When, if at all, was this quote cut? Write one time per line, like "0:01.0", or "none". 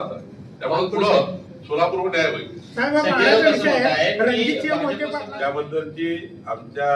0:05.0